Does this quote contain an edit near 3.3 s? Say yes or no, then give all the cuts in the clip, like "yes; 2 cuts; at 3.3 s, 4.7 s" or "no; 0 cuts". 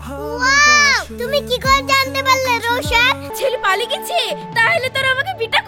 yes; 1 cut; at 3.3 s